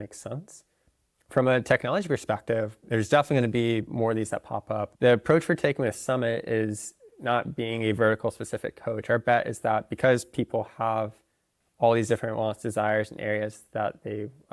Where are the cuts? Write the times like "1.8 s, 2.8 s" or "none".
4.9 s